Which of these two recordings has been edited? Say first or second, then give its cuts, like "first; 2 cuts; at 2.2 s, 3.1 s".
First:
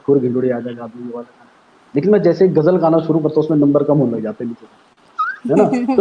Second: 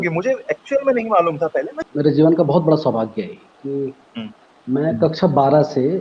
second; 1 cut; at 1.8 s